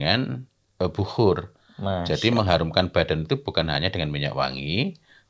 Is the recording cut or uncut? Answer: uncut